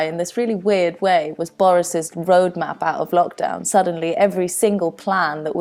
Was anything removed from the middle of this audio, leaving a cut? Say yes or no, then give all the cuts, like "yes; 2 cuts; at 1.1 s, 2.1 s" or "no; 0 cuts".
no; 0 cuts